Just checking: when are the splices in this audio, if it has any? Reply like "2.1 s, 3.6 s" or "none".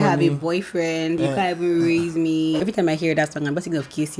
1.2 s, 2.6 s